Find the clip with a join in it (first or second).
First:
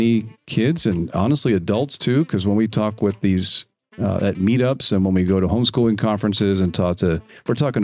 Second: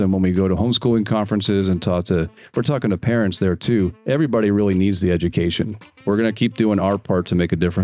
second